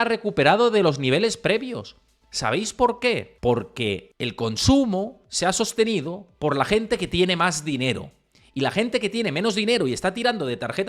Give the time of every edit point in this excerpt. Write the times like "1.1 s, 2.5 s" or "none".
3.3 s, 4.1 s